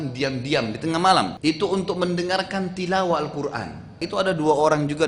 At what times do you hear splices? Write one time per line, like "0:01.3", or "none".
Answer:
0:01.3
0:04.0